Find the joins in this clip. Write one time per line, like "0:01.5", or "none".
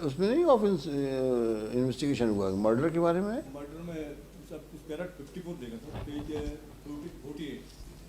none